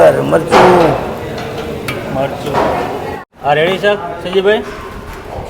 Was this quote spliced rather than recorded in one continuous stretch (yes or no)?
yes